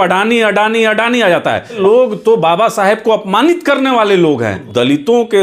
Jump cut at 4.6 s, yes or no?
yes